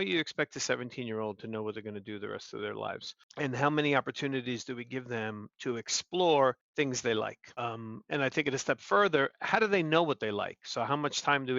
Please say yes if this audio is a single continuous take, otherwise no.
no